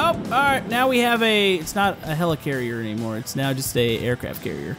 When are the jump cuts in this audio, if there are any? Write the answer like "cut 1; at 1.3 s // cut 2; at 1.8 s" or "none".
none